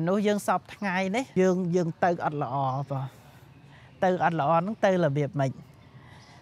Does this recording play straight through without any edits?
no; 1 cut; at 1.3 s

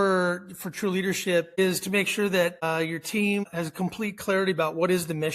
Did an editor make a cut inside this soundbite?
yes; 3 cuts; at 1.5 s, 2.6 s, 3.5 s

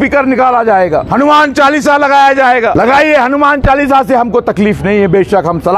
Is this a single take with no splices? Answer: no; 2 cuts; at 1.1 s, 2.7 s

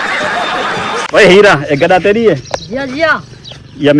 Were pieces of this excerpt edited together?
yes; 1 cut; at 1.0 s

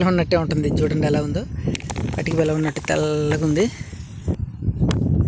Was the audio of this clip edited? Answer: yes; 1 cut; at 4.4 s

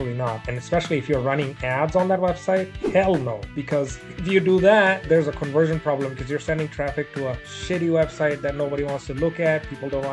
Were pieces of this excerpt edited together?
no; 0 cuts

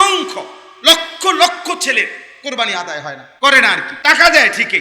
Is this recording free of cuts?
no; 2 cuts; at 3.2 s, 3.9 s

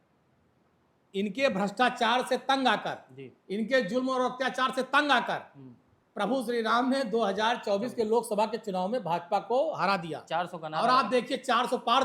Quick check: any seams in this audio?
no; 0 cuts

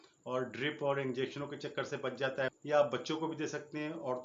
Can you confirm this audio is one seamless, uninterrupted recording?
no; 1 cut; at 2.5 s

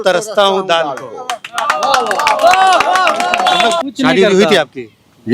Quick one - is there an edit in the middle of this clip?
yes; 1 cut; at 3.8 s

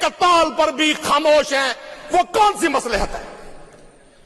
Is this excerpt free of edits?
yes; 0 cuts

